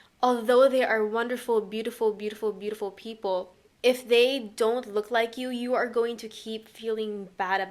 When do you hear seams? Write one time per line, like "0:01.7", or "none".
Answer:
0:03.6